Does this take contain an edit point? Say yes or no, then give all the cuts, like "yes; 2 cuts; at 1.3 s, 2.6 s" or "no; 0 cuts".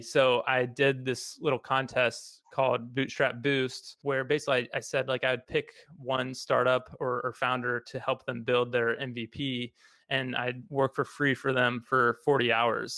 yes; 1 cut; at 3.9 s